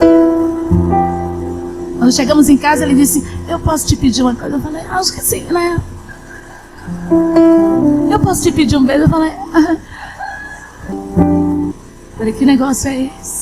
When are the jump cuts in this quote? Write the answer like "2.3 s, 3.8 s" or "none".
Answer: 11.0 s, 11.9 s